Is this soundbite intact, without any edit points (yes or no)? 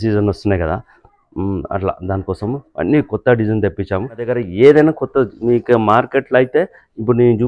no